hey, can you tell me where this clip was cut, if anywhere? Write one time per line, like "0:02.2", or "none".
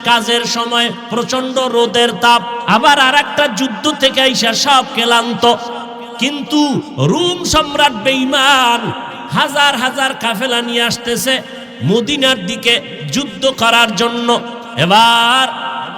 0:02.6
0:14.6